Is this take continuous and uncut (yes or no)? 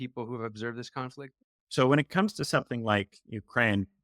no